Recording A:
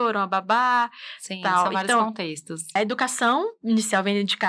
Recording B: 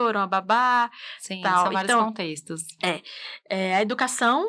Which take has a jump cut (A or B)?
A